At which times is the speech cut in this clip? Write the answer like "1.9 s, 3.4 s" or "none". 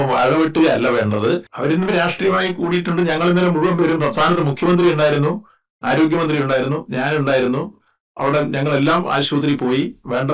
1.5 s

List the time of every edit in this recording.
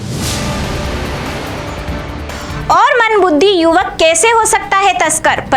2.3 s

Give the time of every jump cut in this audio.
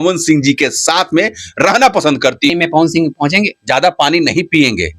2.5 s

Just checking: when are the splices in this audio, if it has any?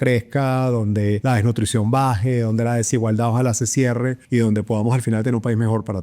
1.2 s, 4.2 s

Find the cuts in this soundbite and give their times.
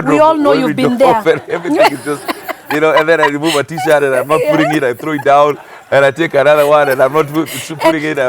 none

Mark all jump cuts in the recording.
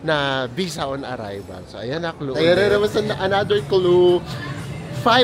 2.3 s

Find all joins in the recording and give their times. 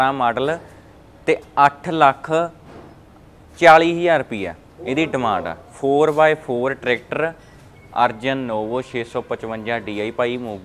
none

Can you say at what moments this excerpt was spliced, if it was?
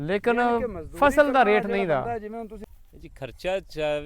2.6 s

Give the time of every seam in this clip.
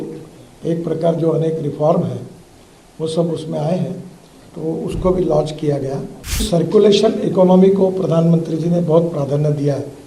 6.4 s

